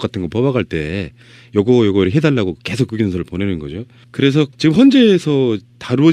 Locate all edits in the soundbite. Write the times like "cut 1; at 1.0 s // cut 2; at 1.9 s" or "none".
cut 1; at 2.0 s